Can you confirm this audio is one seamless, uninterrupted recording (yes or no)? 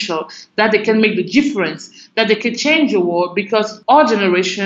no